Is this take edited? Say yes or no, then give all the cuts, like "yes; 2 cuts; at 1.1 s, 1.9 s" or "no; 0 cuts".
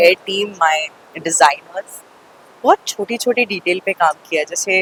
no; 0 cuts